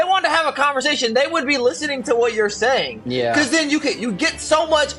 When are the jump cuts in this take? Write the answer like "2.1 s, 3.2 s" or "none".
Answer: none